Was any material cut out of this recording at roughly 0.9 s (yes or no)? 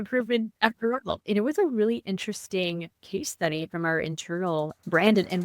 yes